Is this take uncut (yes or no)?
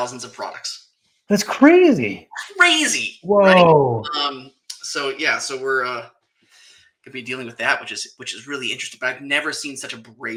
yes